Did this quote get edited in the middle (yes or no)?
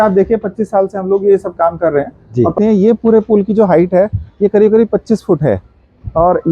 yes